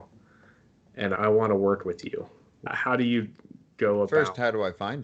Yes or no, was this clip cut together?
yes